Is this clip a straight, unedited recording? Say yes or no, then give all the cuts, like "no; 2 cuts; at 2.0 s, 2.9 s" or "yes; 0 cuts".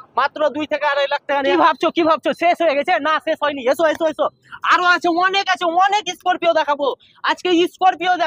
no; 1 cut; at 1.5 s